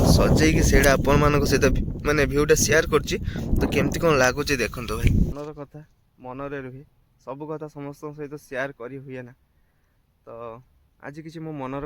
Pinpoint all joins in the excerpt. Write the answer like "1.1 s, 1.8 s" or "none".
5.3 s